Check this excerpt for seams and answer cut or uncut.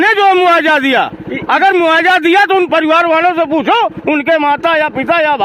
uncut